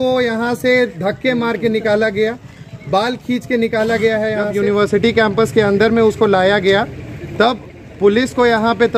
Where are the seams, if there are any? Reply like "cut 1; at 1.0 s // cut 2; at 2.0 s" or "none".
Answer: cut 1; at 4.5 s